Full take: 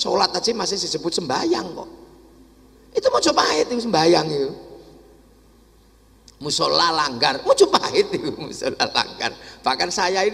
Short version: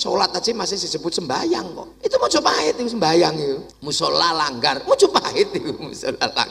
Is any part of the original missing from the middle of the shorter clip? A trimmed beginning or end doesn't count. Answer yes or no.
yes